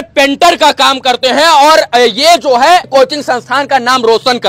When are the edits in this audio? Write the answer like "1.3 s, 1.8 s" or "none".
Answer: 2.9 s

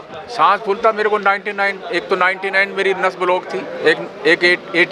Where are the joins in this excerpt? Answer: none

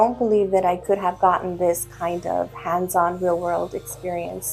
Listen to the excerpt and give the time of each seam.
none

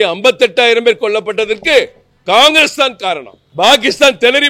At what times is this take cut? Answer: 3.4 s

